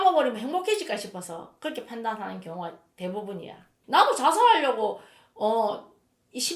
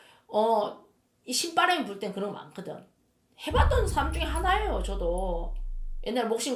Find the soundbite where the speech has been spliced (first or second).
first